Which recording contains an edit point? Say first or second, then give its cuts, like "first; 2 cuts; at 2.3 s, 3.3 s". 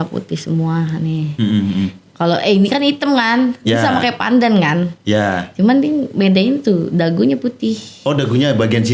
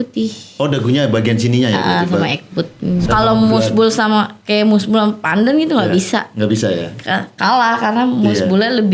second; 1 cut; at 3.1 s